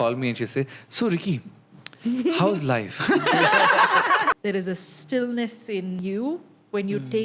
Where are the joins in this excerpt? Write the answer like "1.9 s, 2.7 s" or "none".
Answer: 4.4 s, 6.0 s